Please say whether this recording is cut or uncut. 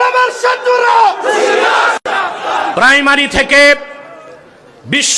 cut